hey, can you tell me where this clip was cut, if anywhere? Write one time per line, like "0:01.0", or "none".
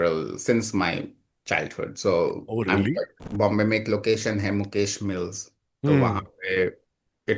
0:03.3